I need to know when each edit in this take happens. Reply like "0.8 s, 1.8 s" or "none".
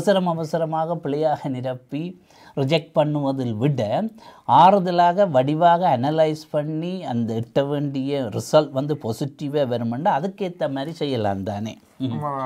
none